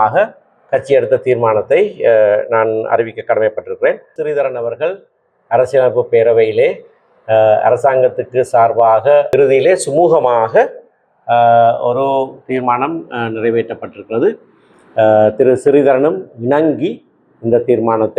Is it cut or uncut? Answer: cut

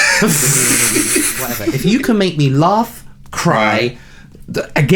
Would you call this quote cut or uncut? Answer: cut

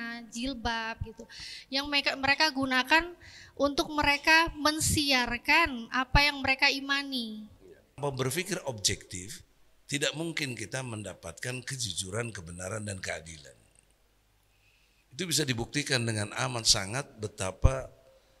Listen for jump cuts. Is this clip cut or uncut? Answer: cut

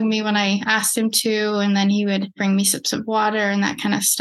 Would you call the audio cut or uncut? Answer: cut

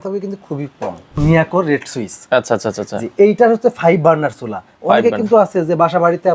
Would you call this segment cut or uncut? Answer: cut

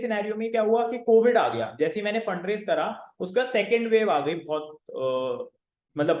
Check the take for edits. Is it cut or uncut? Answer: uncut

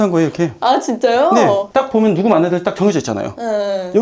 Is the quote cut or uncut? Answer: uncut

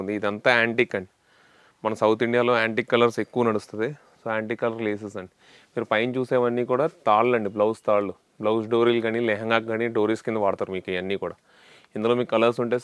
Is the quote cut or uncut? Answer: uncut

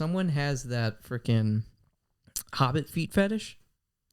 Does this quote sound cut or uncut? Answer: uncut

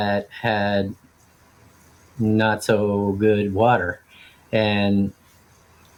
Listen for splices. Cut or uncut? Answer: uncut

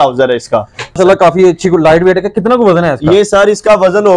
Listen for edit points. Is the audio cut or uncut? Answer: cut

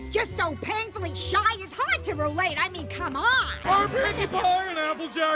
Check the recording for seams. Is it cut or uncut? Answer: cut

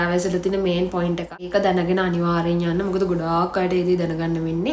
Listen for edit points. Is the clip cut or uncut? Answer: cut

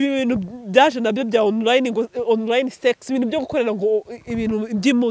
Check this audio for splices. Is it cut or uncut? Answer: uncut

